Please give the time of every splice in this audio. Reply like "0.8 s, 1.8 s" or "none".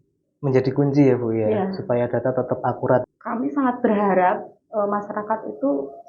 3.1 s